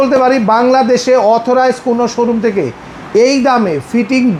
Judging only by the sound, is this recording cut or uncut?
uncut